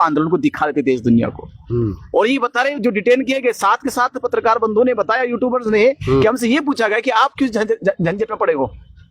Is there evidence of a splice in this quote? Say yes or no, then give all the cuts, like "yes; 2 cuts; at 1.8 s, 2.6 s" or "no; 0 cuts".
no; 0 cuts